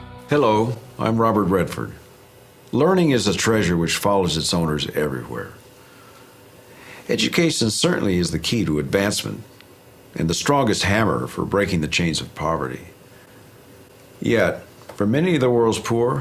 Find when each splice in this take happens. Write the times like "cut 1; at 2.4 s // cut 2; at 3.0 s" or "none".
cut 1; at 5.1 s